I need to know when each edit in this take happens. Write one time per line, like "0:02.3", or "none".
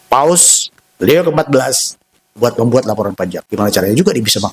0:03.4

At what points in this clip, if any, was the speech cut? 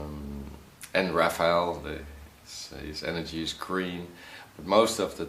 0:03.3

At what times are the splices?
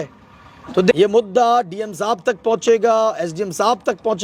0:00.9

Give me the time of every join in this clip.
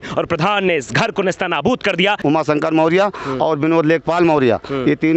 0:02.2

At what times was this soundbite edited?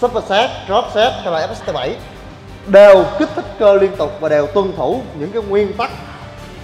none

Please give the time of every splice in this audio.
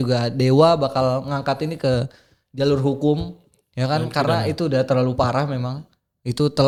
none

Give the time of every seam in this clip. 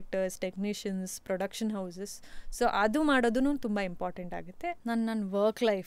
0:04.8

